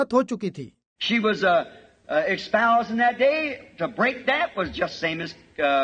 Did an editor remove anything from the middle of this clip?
no; 0 cuts

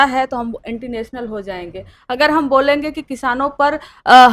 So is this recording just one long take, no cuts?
yes; 0 cuts

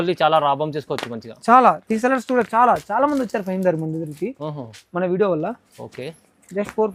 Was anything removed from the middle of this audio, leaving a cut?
no; 0 cuts

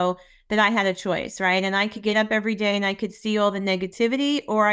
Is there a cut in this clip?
no; 0 cuts

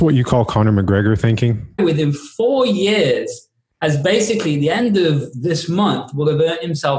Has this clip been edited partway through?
yes; 1 cut; at 1.8 s

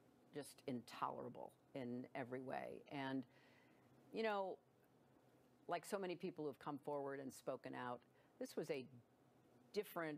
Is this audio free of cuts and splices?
yes; 0 cuts

